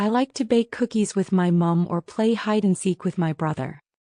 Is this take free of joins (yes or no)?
no